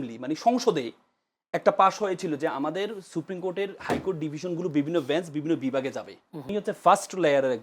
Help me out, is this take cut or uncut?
cut